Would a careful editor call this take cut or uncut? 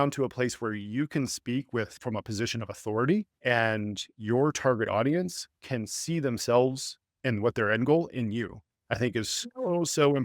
cut